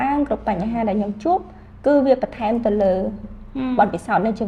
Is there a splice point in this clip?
no; 0 cuts

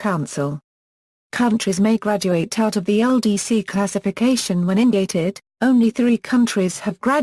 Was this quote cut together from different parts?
no; 0 cuts

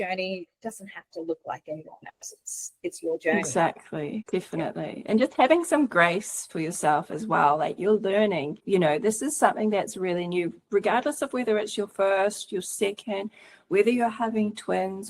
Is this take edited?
yes; 2 cuts; at 4.2 s, 8.6 s

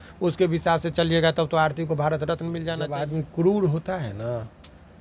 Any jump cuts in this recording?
yes; 1 cut; at 2.7 s

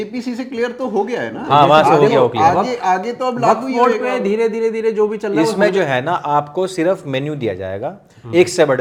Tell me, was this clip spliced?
no; 0 cuts

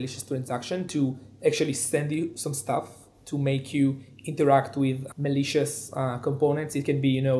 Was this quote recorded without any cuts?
yes; 0 cuts

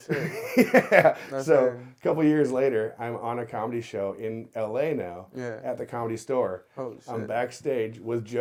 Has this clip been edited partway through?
no; 0 cuts

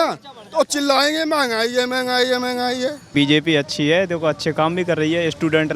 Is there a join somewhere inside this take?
yes; 1 cut; at 3.1 s

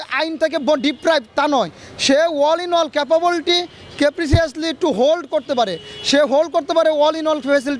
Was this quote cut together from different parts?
no; 0 cuts

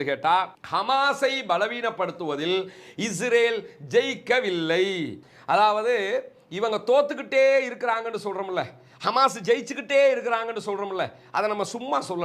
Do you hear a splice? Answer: yes; 1 cut; at 5.3 s

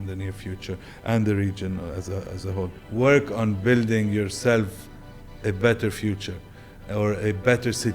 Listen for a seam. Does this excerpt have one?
yes; 1 cut; at 2.8 s

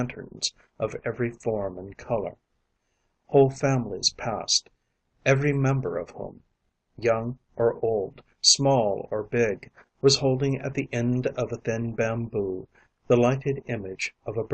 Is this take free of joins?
no; 1 cut; at 1.0 s

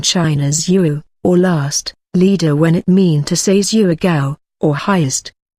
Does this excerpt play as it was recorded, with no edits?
yes; 0 cuts

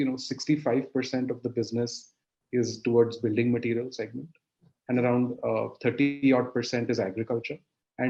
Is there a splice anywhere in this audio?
no; 0 cuts

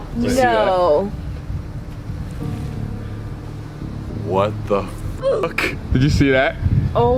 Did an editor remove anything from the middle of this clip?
no; 0 cuts

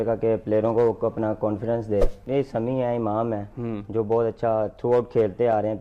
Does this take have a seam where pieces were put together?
yes; 1 cut; at 2.2 s

